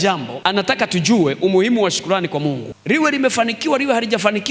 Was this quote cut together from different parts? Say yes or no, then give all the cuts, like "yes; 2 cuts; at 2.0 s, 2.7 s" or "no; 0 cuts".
no; 0 cuts